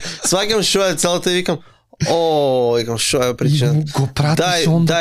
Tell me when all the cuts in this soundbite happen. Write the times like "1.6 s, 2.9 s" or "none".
none